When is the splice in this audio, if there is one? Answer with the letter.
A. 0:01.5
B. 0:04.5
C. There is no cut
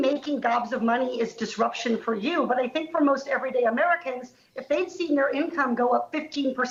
C